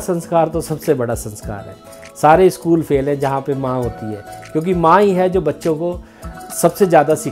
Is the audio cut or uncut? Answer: uncut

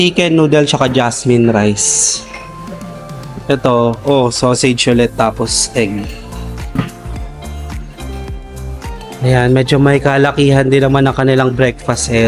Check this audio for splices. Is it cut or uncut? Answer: uncut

